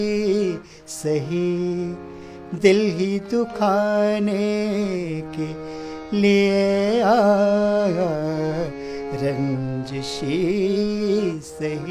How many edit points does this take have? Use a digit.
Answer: 0